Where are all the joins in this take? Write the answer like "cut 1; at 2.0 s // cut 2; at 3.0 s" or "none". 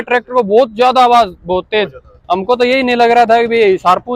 none

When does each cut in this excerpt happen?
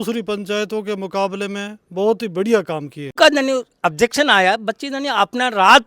cut 1; at 3.2 s

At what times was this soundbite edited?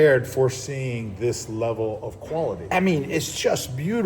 cut 1; at 2.6 s

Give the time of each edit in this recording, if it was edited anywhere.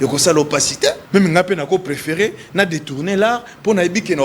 cut 1; at 1.0 s

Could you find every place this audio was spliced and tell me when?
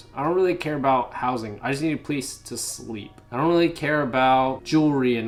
none

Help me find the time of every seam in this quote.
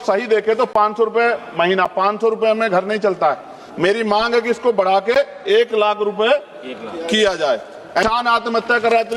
cut 1; at 8.0 s

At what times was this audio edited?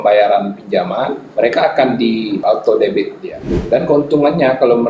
cut 1; at 1.2 s // cut 2; at 2.4 s // cut 3; at 3.6 s

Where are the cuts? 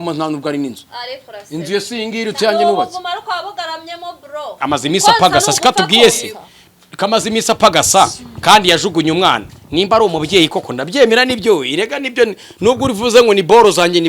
cut 1; at 4.6 s

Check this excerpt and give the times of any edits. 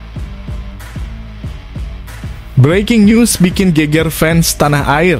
cut 1; at 2.5 s

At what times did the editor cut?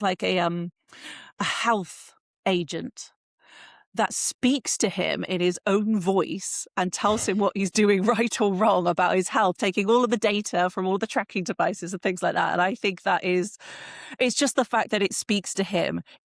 none

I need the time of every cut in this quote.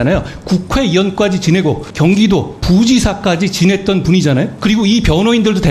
cut 1; at 1.9 s // cut 2; at 4.5 s

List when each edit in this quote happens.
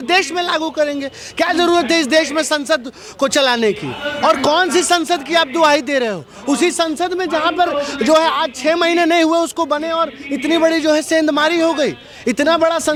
none

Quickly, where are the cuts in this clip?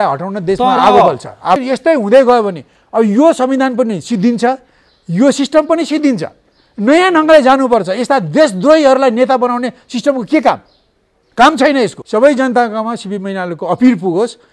cut 1; at 1.6 s // cut 2; at 12.0 s

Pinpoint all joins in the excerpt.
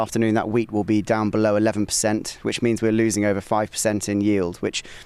none

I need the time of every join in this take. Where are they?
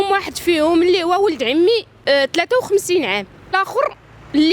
cut 1; at 1.9 s // cut 2; at 3.6 s

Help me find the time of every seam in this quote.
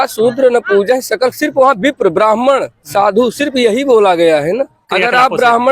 cut 1; at 4.8 s

